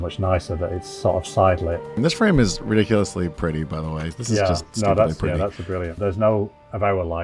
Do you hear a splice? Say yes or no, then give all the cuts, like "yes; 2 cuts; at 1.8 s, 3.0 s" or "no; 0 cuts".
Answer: yes; 2 cuts; at 1.9 s, 5.9 s